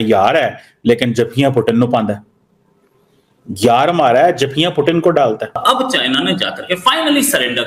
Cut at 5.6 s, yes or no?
yes